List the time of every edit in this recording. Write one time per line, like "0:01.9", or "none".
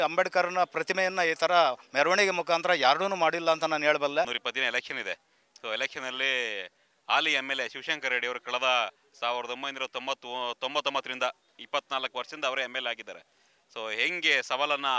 0:04.4

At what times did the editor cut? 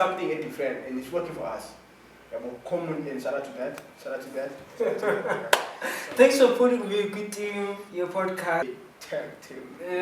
0:08.6

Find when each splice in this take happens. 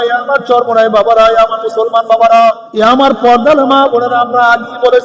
0:02.6

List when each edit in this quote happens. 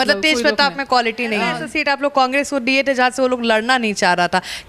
0:01.7

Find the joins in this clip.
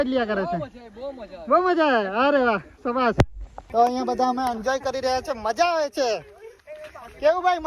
0:03.6

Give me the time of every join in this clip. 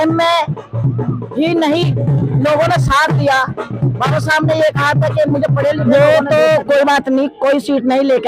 0:05.8

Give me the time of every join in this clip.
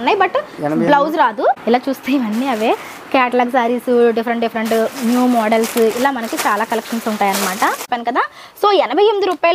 0:01.6
0:07.8

